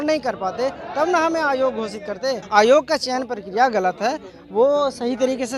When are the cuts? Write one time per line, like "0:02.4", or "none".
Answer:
0:02.4